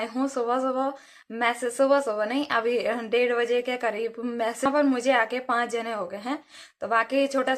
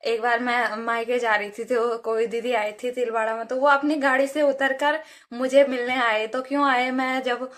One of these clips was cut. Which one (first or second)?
first